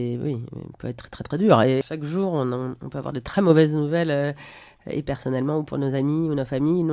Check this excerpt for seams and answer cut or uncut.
cut